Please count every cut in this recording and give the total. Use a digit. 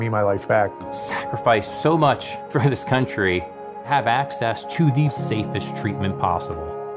1